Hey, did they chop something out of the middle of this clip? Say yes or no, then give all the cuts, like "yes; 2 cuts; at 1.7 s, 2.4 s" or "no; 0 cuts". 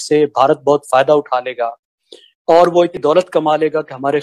yes; 1 cut; at 3.0 s